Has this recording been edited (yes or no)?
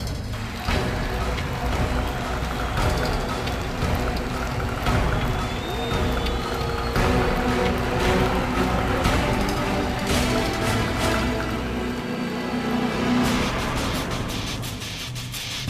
no